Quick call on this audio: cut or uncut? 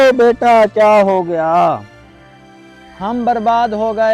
uncut